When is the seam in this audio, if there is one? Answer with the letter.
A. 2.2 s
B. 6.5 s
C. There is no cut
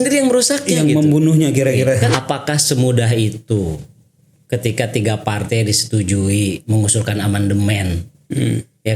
A